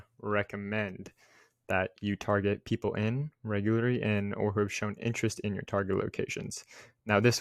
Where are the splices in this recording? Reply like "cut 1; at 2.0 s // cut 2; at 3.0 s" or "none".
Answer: none